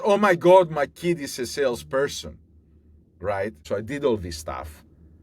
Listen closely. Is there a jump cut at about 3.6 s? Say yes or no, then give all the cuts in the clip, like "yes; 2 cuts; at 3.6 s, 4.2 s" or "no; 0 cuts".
yes; 1 cut; at 3.6 s